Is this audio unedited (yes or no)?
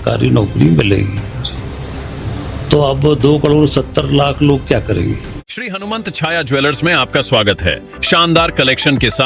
no